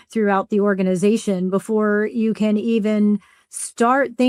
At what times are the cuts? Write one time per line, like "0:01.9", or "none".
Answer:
none